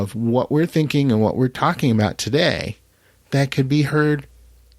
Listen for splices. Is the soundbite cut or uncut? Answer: uncut